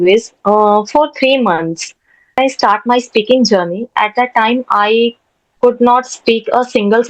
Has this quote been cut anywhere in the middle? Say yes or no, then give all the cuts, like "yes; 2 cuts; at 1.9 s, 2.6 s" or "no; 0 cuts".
yes; 1 cut; at 2.4 s